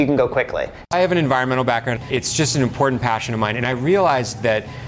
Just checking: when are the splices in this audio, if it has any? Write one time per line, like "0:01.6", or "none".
0:00.9
0:02.0